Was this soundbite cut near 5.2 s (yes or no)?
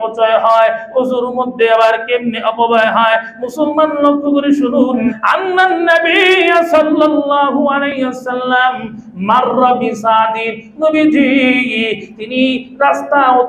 yes